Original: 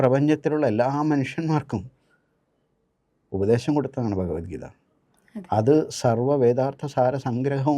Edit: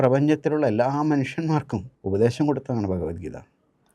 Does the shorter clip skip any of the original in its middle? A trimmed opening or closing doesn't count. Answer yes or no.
yes